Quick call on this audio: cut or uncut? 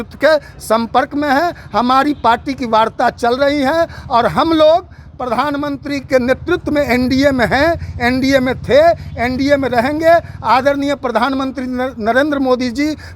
uncut